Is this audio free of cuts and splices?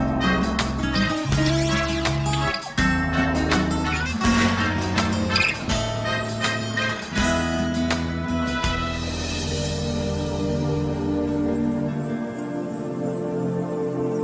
no; 1 cut; at 10.0 s

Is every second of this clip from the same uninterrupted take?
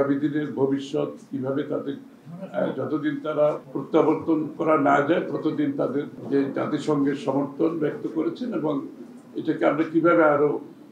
no; 3 cuts; at 3.7 s, 4.5 s, 6.2 s

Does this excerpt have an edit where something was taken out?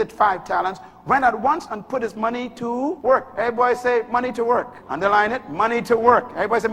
yes; 2 cuts; at 3.0 s, 4.8 s

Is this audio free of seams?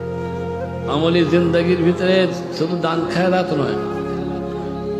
yes; 0 cuts

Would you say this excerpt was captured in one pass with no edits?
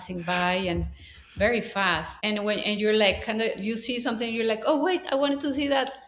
no; 1 cut; at 2.1 s

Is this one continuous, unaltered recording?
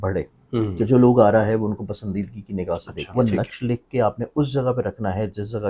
no; 1 cut; at 3.0 s

